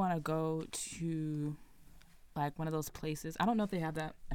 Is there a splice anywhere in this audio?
no; 0 cuts

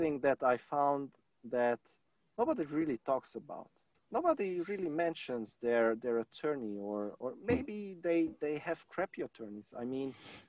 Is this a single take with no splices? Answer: no; 1 cut; at 3.9 s

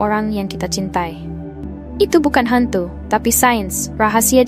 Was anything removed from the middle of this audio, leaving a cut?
yes; 1 cut; at 1.7 s

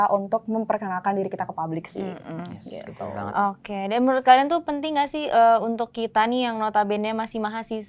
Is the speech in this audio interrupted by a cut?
no; 0 cuts

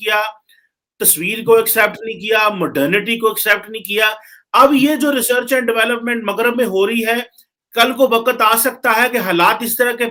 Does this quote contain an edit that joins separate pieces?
no; 0 cuts

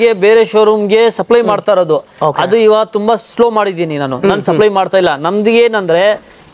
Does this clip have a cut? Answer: no; 0 cuts

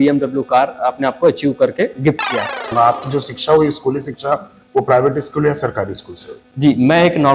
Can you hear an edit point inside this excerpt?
yes; 1 cut; at 2.6 s

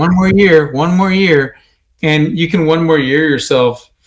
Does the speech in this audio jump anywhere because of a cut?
no; 0 cuts

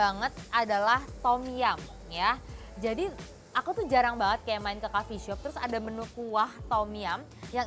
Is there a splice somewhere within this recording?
no; 0 cuts

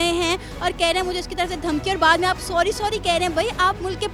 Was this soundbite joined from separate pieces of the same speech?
no; 0 cuts

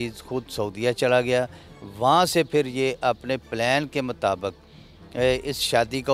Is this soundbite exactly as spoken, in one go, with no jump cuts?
yes; 0 cuts

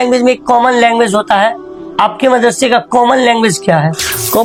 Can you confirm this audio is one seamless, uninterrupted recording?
yes; 0 cuts

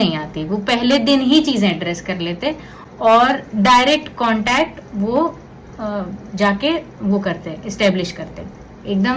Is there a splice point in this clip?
no; 0 cuts

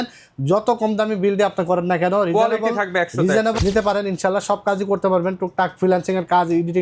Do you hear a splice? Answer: yes; 1 cut; at 3.6 s

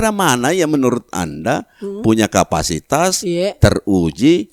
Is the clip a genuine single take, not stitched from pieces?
yes; 0 cuts

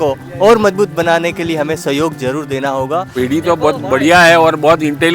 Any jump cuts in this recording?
yes; 1 cut; at 3.1 s

